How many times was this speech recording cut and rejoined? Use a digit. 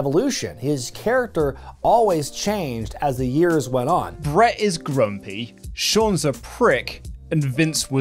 1